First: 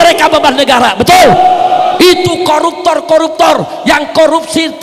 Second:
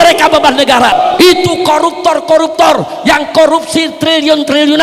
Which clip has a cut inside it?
second; 1 cut; at 0.9 s

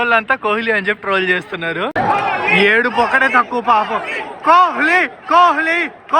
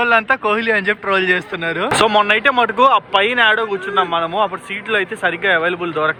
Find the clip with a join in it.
first; 1 cut; at 1.9 s

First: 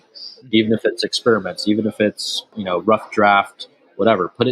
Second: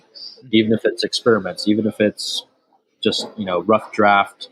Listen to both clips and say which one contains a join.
first; 1 cut; at 2.5 s

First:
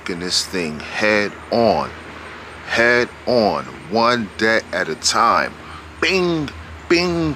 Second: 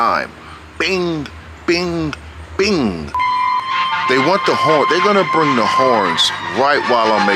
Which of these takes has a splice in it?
second; 1 cut; at 3.2 s

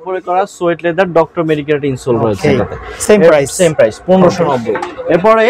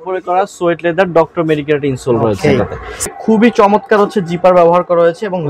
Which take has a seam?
second; 1 cut; at 3.1 s

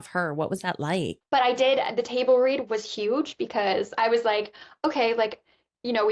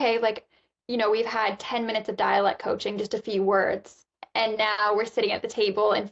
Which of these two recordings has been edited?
first; 1 cut; at 1.2 s

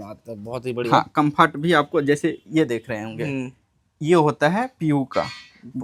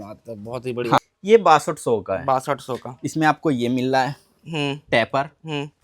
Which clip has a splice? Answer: second; 1 cut; at 1.1 s

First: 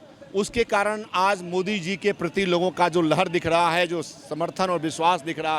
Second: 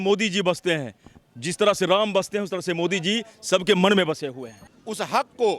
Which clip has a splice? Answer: second; 1 cut; at 4.6 s

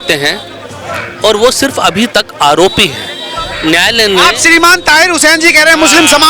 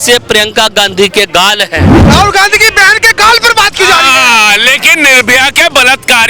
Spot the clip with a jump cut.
second; 1 cut; at 2.0 s

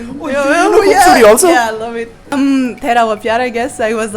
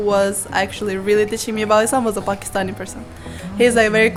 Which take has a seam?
first; 1 cut; at 2.3 s

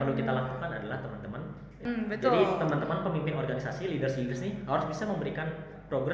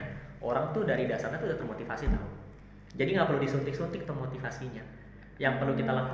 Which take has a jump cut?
first; 1 cut; at 1.8 s

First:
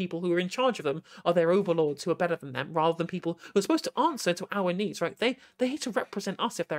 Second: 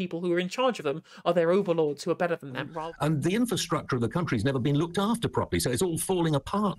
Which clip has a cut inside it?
second; 1 cut; at 2.7 s

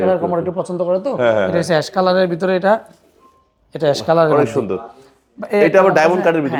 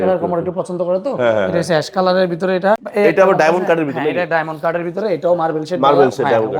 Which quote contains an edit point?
second; 1 cut; at 2.9 s

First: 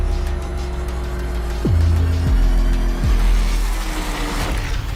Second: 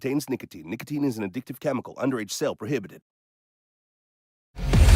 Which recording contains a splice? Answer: second; 1 cut; at 1.1 s

